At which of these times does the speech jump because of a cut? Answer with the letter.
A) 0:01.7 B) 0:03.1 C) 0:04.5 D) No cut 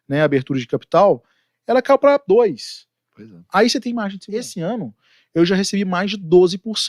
C